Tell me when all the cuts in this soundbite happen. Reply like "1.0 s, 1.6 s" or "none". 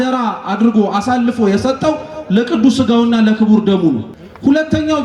4.1 s